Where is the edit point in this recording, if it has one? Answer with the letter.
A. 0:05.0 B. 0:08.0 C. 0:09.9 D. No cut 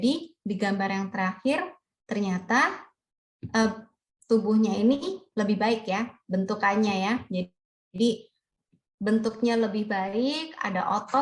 C